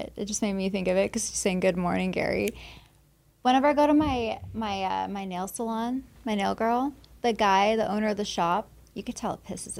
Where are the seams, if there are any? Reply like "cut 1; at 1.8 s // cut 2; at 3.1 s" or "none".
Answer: none